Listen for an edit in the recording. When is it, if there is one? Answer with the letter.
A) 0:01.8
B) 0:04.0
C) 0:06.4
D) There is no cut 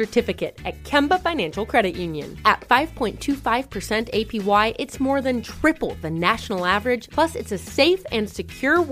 D